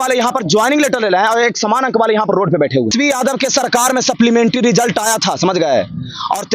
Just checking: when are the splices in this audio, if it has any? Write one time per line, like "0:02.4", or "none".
0:02.9